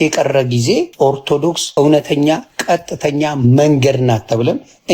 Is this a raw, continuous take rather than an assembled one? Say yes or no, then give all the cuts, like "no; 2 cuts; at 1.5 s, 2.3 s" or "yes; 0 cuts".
yes; 0 cuts